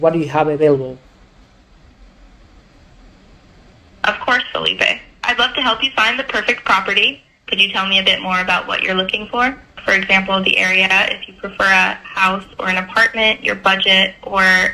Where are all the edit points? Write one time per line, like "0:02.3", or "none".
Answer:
none

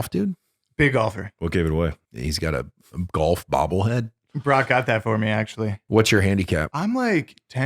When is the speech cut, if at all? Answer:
0:01.3
0:02.1
0:05.8
0:06.7

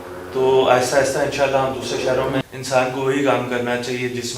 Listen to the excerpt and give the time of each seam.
0:02.4

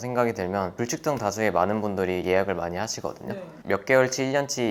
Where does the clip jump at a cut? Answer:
0:03.6

